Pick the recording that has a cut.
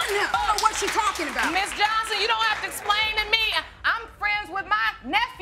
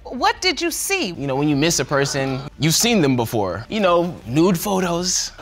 second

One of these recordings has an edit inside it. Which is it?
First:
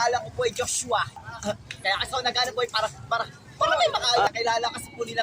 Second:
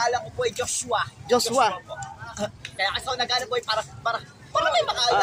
first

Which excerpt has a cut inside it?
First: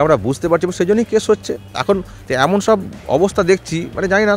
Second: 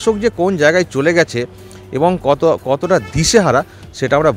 first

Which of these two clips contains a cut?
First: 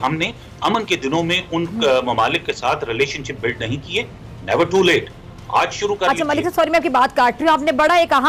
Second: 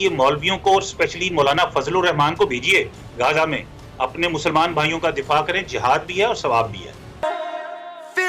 second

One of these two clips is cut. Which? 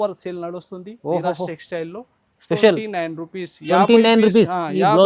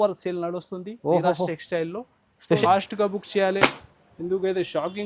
second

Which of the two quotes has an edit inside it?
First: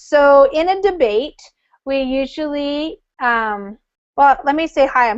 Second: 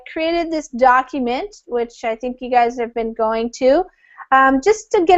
first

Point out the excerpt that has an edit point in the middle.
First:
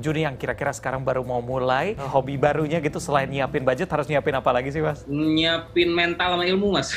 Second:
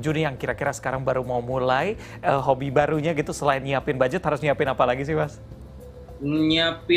first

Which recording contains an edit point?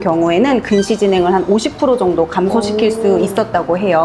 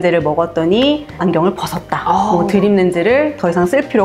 second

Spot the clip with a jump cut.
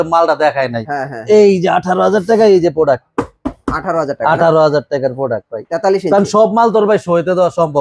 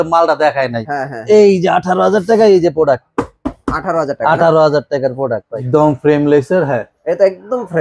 second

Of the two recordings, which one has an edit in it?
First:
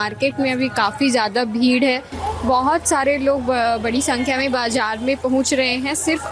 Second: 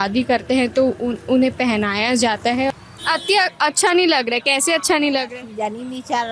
second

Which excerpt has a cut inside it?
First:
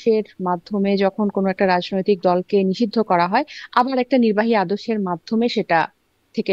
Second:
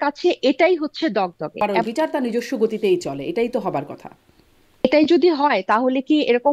second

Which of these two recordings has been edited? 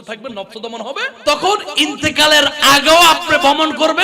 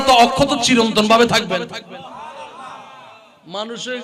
first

